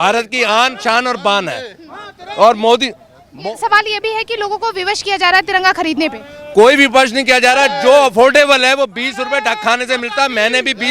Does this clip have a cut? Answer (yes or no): no